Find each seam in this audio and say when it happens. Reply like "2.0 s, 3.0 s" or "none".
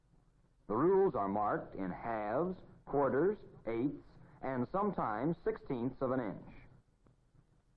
3.5 s